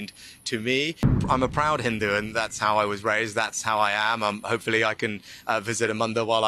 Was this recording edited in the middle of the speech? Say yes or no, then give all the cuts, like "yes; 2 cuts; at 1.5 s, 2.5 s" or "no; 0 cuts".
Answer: yes; 1 cut; at 1.1 s